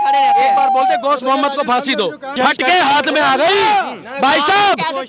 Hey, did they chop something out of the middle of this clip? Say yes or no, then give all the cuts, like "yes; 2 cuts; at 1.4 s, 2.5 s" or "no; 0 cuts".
yes; 1 cut; at 2.3 s